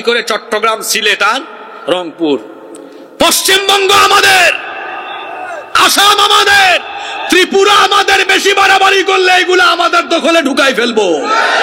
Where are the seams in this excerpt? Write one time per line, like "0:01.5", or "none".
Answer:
none